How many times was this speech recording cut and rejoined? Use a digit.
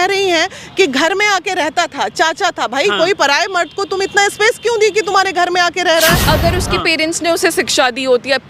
1